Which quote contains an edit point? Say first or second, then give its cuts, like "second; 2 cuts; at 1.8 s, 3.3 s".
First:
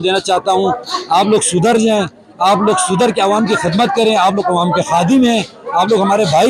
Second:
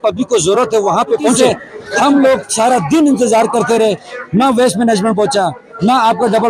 second; 1 cut; at 1.4 s